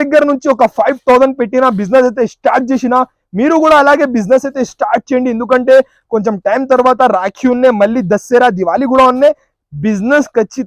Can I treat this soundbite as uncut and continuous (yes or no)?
yes